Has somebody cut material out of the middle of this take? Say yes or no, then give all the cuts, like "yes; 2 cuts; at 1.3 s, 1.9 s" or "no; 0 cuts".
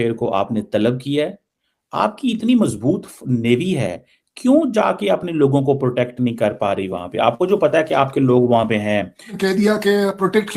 yes; 1 cut; at 9.3 s